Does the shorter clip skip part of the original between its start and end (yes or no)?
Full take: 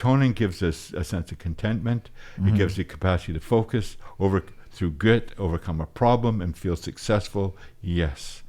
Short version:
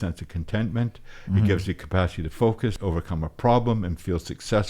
yes